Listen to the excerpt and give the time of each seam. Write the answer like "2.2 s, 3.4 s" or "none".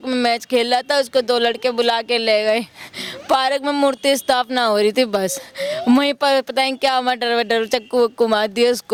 none